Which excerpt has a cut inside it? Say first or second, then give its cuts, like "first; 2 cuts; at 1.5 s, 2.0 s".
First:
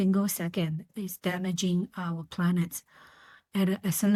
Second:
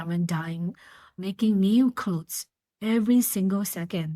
second; 1 cut; at 1.1 s